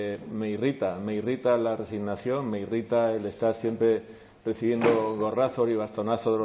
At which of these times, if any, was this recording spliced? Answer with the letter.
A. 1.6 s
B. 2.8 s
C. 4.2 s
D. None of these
A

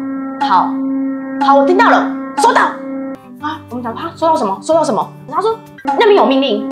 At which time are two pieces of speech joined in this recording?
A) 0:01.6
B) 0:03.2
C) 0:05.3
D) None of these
C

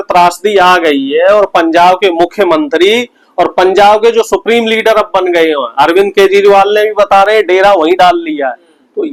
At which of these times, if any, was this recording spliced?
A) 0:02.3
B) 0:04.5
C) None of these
C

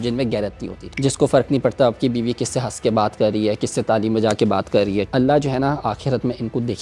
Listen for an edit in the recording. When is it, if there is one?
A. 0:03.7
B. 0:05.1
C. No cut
B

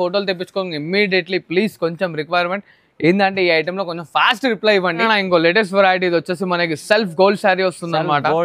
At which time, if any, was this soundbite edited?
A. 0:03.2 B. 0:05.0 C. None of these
B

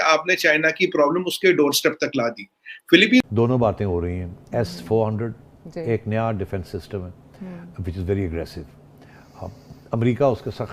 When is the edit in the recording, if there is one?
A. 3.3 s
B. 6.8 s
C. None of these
A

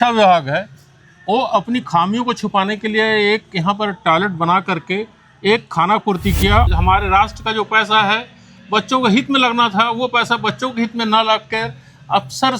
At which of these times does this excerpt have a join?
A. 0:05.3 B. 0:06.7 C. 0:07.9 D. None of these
B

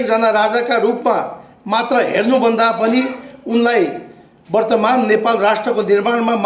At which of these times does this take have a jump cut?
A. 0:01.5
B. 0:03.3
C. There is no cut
C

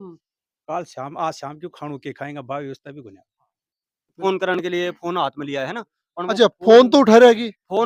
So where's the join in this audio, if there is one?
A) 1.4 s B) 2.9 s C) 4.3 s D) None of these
C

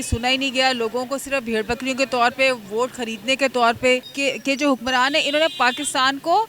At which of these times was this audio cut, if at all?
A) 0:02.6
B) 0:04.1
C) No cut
B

